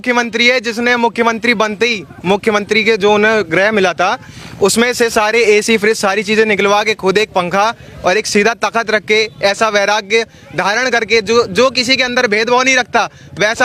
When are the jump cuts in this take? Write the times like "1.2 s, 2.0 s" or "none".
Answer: none